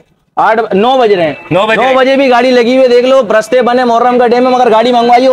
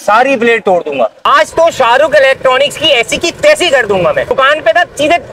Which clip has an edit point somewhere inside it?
second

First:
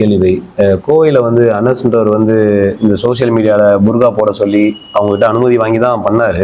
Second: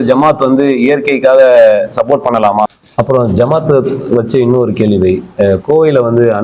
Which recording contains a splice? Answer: second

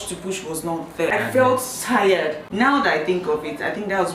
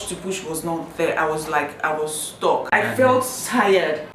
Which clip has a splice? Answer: first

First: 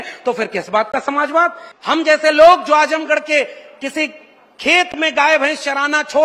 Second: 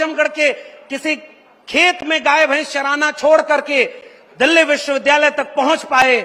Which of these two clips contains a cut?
first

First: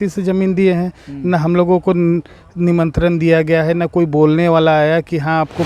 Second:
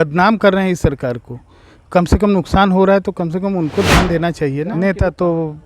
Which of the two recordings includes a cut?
second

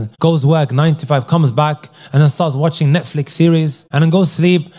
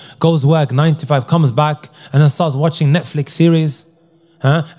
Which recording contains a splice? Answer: first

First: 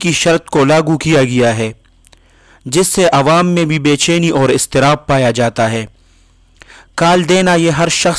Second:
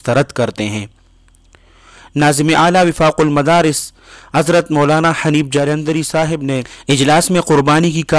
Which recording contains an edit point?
second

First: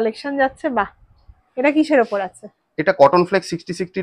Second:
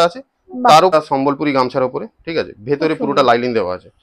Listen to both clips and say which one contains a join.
second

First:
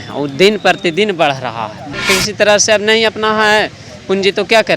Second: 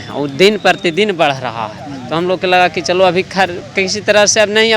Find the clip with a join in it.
first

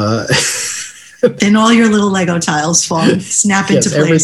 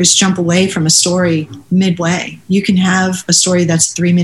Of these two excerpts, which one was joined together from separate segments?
first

